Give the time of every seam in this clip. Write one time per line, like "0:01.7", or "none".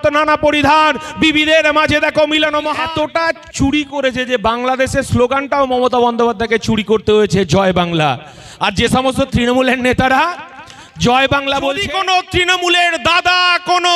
0:02.7
0:11.8